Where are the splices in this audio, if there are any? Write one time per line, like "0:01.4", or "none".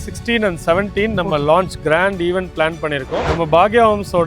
0:03.2